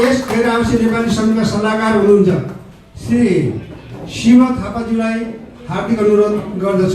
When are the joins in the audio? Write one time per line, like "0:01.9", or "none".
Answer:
0:03.2